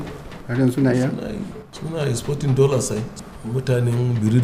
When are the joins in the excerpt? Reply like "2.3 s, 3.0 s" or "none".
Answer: 3.1 s